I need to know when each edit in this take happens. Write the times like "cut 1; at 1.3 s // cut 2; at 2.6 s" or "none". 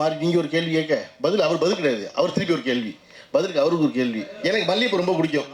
cut 1; at 4.3 s